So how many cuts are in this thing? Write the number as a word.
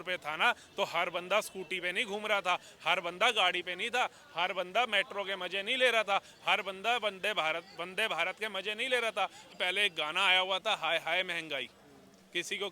one